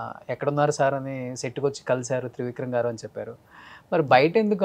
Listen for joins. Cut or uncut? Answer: uncut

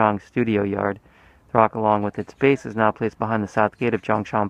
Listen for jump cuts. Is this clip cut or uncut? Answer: cut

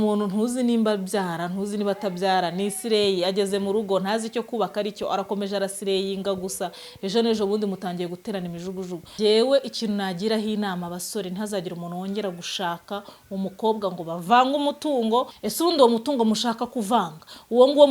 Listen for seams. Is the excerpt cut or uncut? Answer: cut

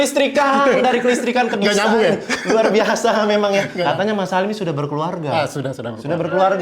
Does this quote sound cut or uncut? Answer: cut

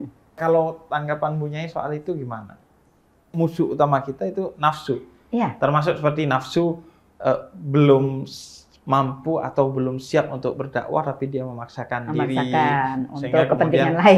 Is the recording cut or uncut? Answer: cut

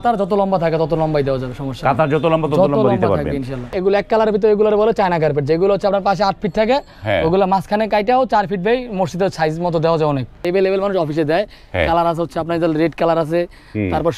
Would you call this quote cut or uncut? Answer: cut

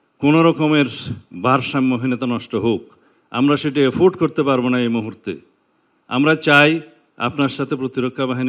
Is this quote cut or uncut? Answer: uncut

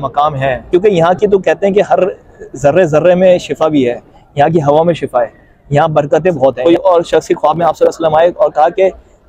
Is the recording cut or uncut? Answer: cut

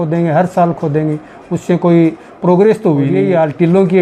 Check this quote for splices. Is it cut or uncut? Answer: cut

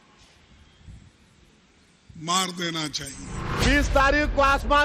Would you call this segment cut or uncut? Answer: cut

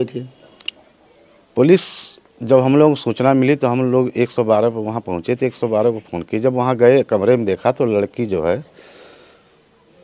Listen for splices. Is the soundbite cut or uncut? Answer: uncut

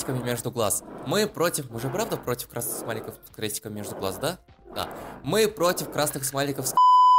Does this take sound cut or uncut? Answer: uncut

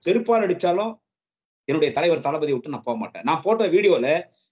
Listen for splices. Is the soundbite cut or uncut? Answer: uncut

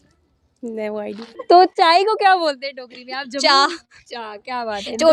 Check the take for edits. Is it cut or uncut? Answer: cut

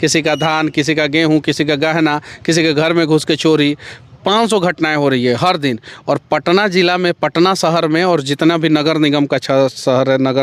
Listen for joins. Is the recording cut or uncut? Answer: uncut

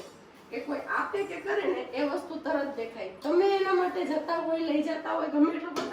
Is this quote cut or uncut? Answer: uncut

